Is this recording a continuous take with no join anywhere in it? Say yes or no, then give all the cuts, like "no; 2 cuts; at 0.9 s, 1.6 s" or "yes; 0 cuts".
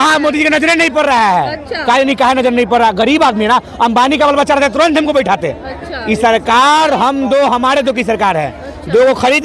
yes; 0 cuts